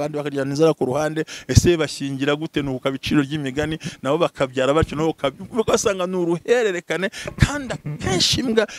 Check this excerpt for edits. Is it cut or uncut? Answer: uncut